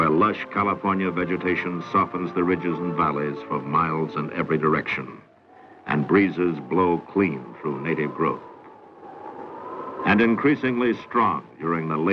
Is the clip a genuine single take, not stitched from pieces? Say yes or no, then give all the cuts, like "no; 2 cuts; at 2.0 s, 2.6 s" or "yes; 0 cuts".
yes; 0 cuts